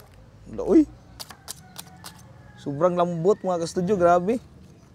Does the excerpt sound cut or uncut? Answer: cut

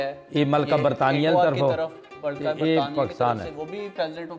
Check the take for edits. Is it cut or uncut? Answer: uncut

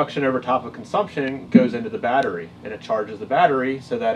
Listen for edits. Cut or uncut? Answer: cut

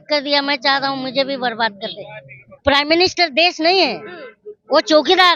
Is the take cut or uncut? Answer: cut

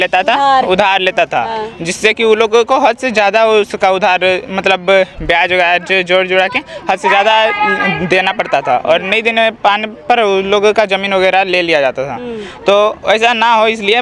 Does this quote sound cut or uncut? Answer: uncut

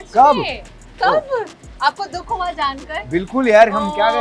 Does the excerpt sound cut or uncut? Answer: uncut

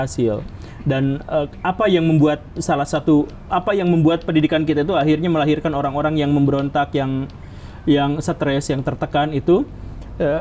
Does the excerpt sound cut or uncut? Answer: uncut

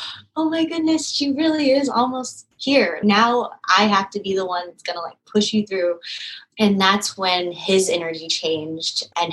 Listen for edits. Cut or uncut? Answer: cut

